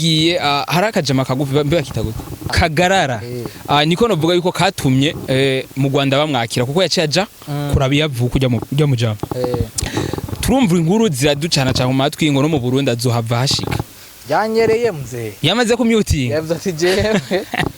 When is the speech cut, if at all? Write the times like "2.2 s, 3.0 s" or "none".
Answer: 2.5 s